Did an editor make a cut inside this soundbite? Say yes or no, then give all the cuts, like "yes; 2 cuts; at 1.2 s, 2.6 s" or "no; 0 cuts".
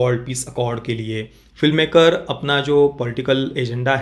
yes; 1 cut; at 1.4 s